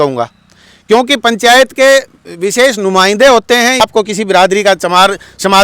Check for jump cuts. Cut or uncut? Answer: cut